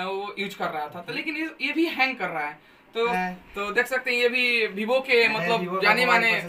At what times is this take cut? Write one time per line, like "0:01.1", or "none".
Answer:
0:03.1